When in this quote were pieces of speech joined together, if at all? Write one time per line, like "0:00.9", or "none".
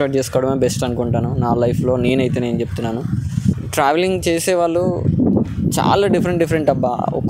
0:03.5